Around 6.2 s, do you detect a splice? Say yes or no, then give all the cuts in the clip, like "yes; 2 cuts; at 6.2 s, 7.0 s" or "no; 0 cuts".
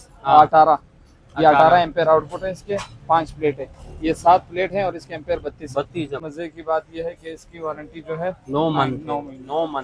yes; 1 cut; at 6.2 s